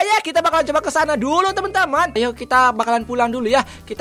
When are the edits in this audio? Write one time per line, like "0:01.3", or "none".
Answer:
0:02.2